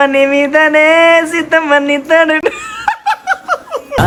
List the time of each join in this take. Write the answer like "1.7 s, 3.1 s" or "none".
none